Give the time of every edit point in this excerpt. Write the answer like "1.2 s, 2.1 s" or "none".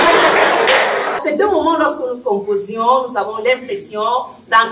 1.2 s